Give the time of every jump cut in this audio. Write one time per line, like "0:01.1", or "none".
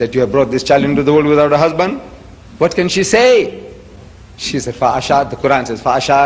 0:02.0